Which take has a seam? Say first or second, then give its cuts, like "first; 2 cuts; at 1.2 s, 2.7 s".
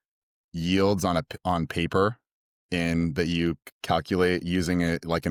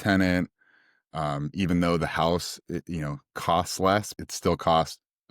second; 1 cut; at 4.2 s